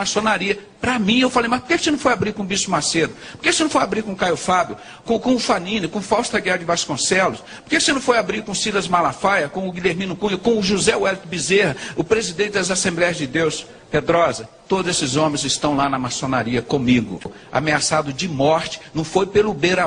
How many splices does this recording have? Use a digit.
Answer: 1